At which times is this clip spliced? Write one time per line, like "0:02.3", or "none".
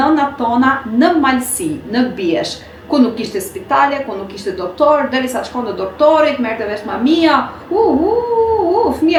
none